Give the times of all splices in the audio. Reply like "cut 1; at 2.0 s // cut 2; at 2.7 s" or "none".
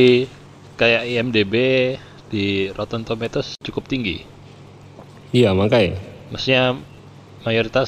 cut 1; at 3.6 s